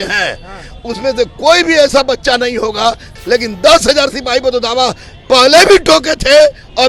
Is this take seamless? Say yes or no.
no